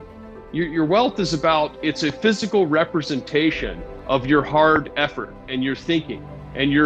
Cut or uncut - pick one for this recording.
uncut